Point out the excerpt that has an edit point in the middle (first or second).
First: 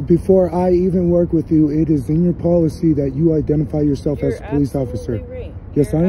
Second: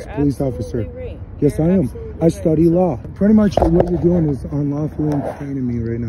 second